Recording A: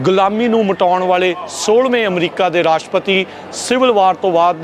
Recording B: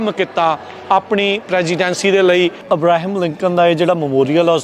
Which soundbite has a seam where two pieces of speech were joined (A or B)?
B